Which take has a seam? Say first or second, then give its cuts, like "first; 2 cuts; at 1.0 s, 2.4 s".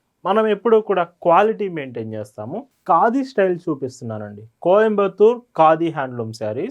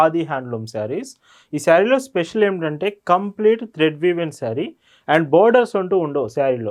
first; 1 cut; at 2.7 s